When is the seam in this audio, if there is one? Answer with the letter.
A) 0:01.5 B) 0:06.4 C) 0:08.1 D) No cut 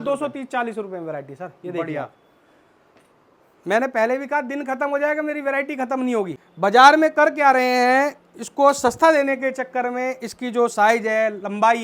B